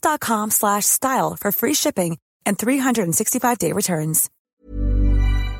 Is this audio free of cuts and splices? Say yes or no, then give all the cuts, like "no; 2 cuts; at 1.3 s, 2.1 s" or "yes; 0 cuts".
no; 1 cut; at 4.3 s